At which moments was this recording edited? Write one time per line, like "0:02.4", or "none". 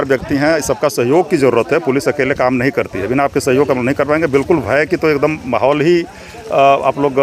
none